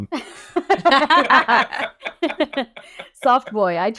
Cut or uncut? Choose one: uncut